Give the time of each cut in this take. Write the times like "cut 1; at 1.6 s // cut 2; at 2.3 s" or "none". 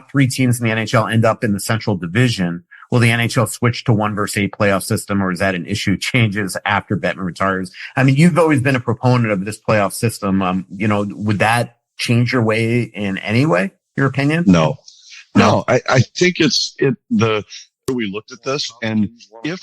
cut 1; at 17.9 s